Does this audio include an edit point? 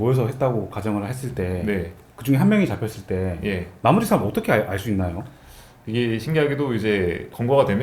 no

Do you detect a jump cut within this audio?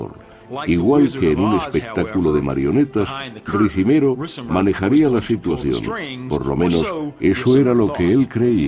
no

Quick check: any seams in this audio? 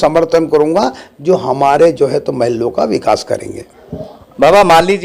no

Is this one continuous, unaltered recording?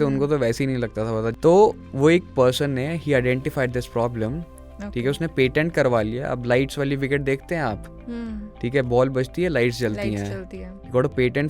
no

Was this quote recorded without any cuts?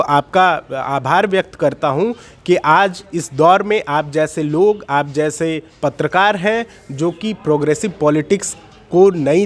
yes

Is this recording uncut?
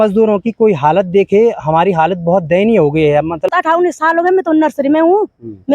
no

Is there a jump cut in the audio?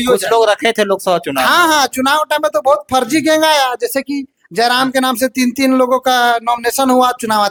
no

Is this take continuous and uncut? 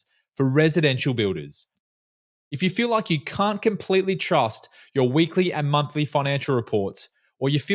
yes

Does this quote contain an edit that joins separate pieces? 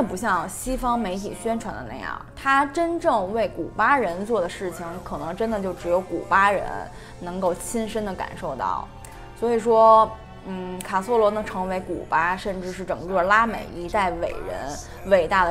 no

